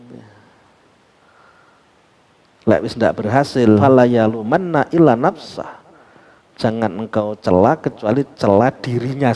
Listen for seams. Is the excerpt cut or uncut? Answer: cut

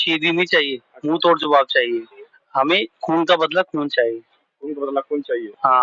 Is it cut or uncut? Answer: cut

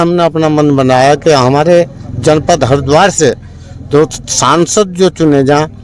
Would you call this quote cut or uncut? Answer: uncut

